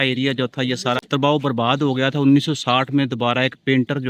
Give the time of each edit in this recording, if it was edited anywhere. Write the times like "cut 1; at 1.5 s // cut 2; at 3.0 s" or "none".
cut 1; at 1.0 s